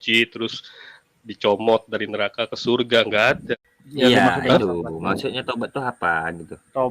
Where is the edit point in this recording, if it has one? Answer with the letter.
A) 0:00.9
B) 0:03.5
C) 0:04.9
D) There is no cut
B